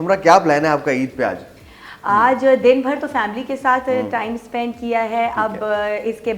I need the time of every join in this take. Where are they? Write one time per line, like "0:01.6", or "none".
none